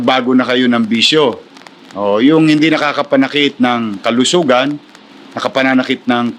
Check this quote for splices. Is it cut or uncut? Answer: uncut